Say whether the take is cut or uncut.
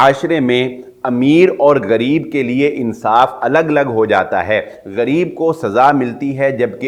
uncut